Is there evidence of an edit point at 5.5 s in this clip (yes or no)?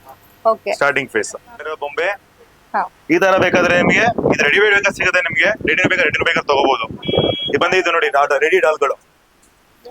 no